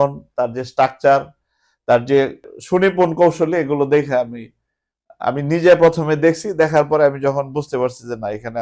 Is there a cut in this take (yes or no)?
yes